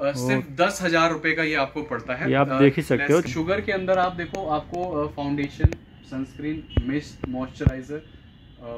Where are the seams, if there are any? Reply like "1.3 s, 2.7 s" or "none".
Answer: 3.3 s